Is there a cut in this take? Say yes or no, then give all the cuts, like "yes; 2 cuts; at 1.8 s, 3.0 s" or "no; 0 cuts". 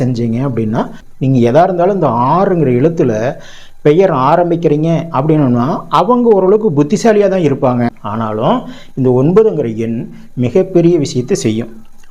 yes; 2 cuts; at 1.0 s, 8.0 s